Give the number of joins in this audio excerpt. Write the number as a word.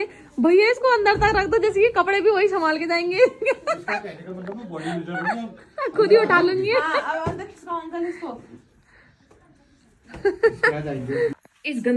zero